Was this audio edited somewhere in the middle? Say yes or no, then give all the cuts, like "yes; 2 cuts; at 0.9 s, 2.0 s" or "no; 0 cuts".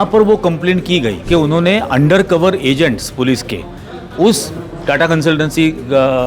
yes; 1 cut; at 1.2 s